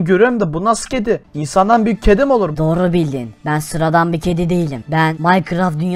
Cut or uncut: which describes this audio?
cut